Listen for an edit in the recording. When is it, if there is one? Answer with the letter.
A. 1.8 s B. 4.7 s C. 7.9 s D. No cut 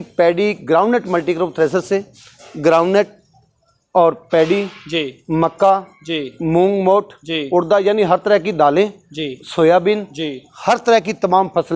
D